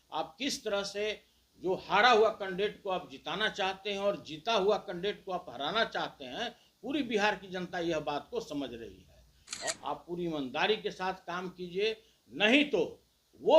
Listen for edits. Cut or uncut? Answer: cut